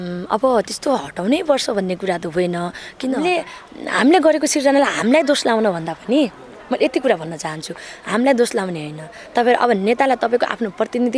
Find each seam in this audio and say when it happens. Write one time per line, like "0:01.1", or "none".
0:03.2

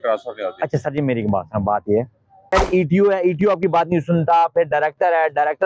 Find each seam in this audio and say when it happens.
0:02.4

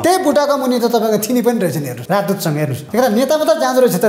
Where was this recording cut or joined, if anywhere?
0:02.3

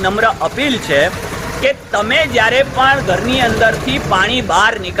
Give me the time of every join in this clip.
none

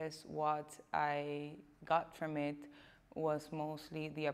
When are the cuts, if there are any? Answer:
none

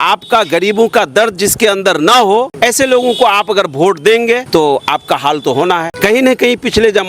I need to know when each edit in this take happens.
0:02.5
0:04.4
0:05.9

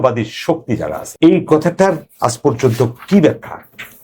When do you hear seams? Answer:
0:01.0

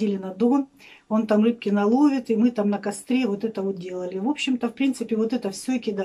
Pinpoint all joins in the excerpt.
none

